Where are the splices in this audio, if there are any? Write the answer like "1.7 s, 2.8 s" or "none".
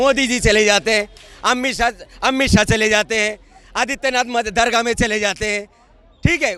none